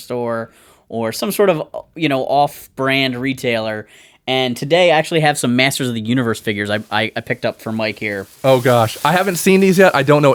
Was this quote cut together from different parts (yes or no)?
no